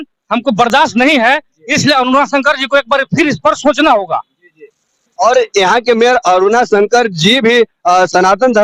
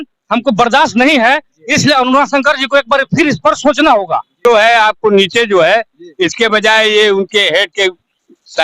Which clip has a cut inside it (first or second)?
second